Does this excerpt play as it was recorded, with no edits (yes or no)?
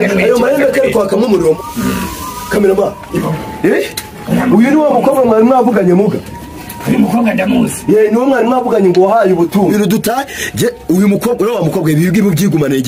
yes